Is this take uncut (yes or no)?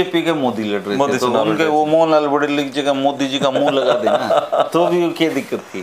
yes